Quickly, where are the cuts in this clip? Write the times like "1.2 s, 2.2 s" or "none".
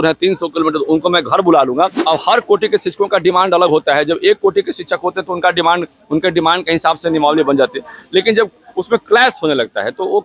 2.0 s